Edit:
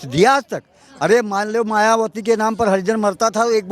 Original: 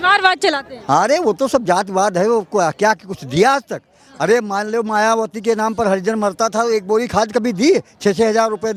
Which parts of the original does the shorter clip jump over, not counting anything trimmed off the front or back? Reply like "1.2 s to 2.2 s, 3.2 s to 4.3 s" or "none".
none